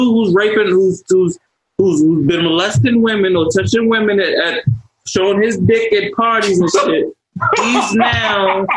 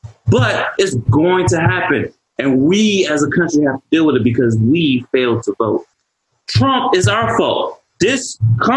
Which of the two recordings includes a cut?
second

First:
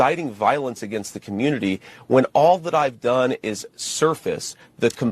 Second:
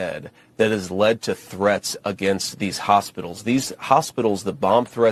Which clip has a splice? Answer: first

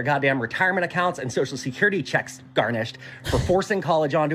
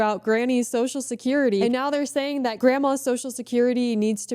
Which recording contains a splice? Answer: second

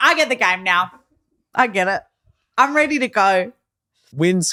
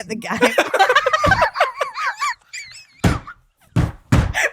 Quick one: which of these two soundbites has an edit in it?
second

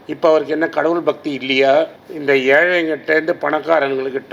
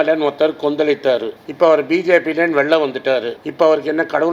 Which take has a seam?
first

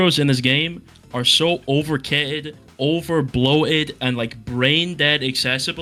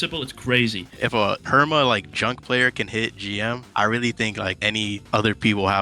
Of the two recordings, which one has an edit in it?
second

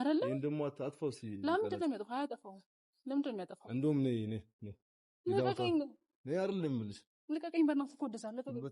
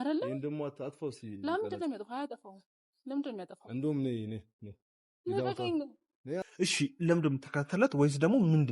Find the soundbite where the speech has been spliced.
second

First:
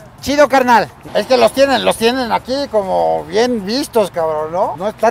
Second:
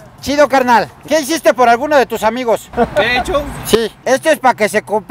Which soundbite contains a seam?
second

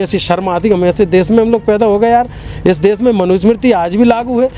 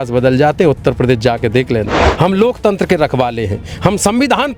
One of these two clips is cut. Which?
second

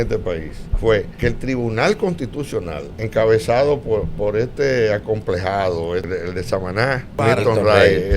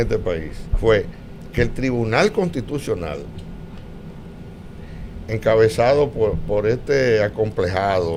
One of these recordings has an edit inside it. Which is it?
first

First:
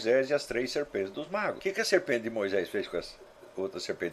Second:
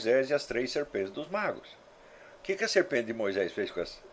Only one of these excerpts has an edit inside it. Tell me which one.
first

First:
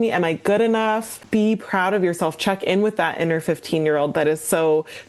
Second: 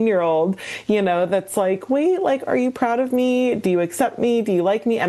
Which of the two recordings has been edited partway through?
first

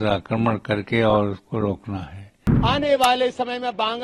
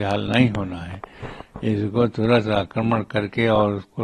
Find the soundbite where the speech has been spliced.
first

